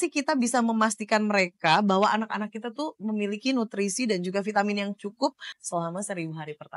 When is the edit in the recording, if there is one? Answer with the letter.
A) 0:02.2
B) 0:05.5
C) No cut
B